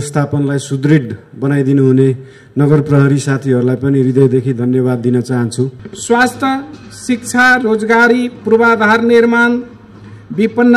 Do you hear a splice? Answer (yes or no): yes